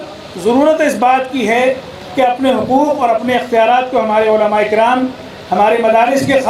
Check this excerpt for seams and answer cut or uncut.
uncut